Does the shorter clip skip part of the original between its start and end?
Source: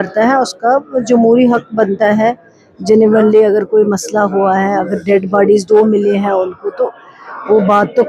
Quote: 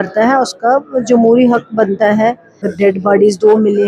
yes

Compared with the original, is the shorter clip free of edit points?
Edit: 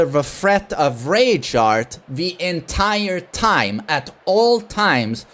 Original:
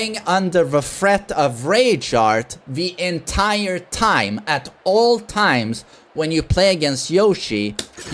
yes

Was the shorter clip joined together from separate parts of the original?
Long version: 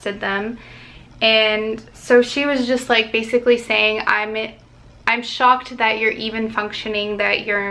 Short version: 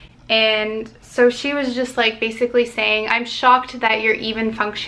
yes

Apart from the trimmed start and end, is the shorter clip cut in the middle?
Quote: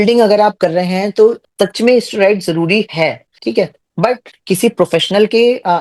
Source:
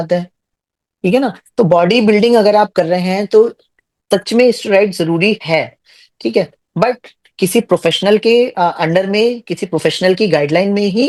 yes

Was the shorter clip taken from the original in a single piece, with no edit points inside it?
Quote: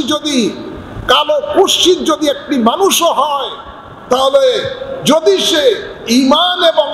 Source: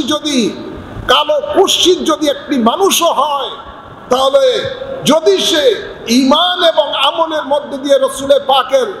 yes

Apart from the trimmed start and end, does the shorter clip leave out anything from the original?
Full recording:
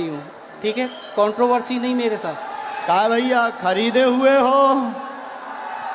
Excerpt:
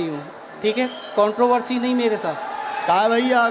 no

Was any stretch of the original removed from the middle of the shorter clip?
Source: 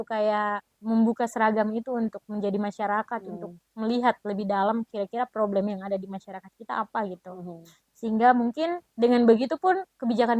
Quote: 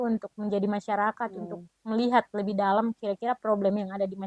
no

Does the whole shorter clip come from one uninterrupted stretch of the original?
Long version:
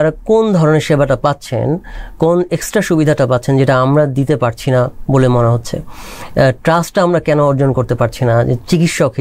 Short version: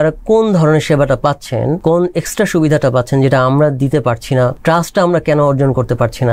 no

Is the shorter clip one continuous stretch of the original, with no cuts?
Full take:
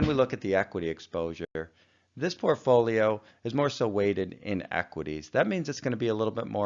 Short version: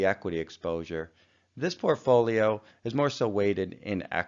no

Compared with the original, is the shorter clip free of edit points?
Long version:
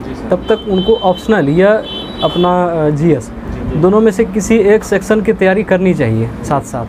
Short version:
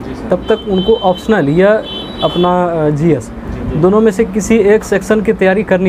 yes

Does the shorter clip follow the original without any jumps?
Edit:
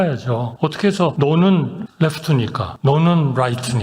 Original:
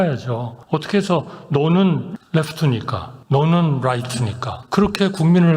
no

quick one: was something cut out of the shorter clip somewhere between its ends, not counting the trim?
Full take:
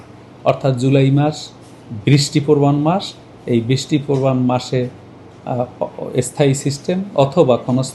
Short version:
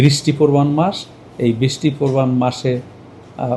no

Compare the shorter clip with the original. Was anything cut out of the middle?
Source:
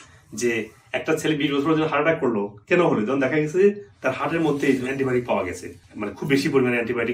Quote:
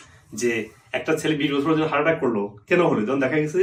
no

